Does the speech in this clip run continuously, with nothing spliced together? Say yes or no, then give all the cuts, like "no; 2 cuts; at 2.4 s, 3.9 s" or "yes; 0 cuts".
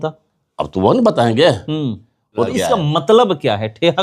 no; 1 cut; at 2.5 s